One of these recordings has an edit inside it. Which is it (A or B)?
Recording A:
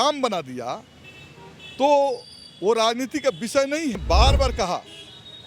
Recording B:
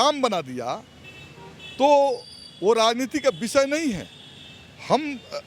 A